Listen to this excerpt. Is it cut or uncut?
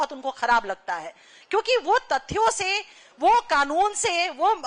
uncut